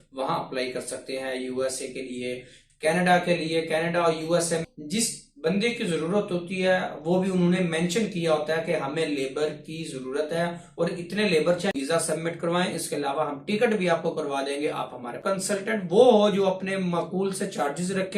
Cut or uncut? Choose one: cut